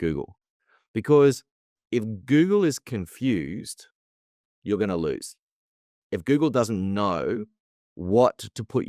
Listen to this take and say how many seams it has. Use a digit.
0